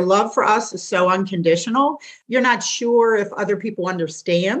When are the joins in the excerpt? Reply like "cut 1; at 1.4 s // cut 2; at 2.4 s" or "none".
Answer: cut 1; at 2.1 s